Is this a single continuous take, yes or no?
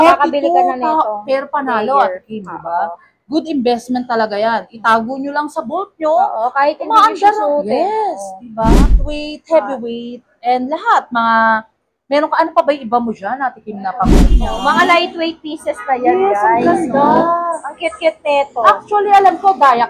no